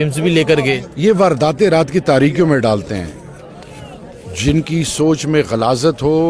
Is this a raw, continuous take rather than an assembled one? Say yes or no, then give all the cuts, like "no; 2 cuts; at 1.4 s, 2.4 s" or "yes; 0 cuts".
yes; 0 cuts